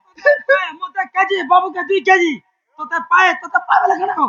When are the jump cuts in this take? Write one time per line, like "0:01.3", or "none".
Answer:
none